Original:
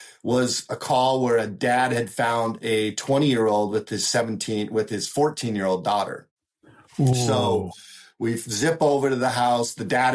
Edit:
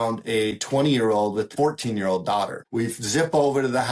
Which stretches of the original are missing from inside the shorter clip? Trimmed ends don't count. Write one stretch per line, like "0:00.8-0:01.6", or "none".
0:03.9-0:05.1
0:06.2-0:08.1